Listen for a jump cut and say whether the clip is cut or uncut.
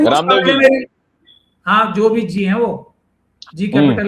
uncut